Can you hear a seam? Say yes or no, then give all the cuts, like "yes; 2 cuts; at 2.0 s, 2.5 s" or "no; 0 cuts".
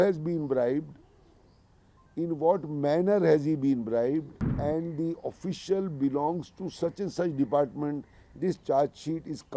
yes; 1 cut; at 4.4 s